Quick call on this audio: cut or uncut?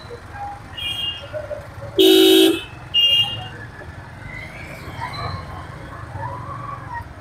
uncut